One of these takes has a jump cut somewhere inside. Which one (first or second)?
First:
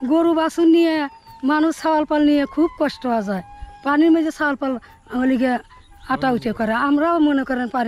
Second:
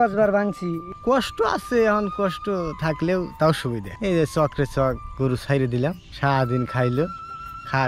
second